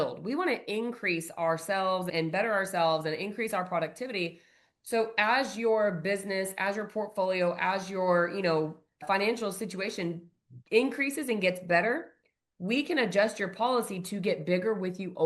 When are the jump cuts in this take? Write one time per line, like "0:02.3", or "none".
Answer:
none